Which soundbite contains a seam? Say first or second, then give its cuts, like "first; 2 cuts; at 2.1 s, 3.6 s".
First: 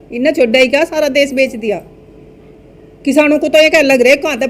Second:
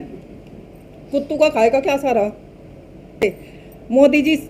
second; 1 cut; at 3.2 s